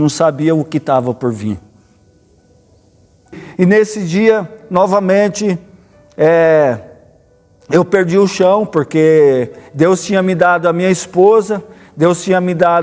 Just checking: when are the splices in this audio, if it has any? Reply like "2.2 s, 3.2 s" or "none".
3.4 s